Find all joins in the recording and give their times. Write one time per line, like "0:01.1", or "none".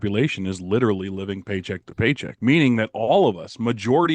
0:02.3